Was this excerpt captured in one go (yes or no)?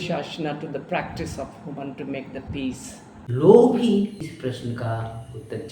no